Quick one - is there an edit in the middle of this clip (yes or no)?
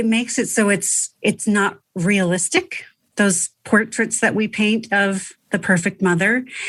no